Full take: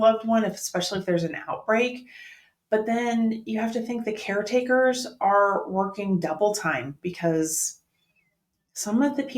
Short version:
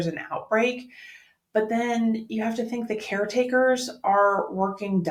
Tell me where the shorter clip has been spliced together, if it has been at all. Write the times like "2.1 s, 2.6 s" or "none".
none